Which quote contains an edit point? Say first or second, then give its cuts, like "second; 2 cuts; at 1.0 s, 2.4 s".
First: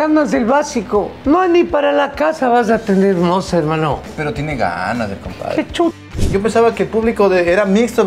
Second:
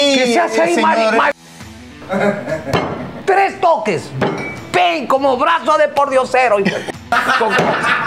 first; 3 cuts; at 1.1 s, 4.1 s, 6.2 s